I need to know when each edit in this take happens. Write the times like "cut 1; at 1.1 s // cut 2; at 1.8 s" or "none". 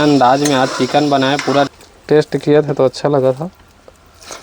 cut 1; at 1.7 s